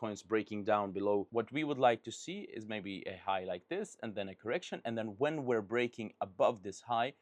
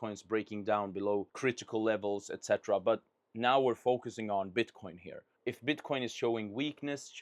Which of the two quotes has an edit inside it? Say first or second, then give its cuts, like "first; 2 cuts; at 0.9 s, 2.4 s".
first; 1 cut; at 1.3 s